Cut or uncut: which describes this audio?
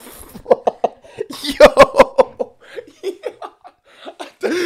uncut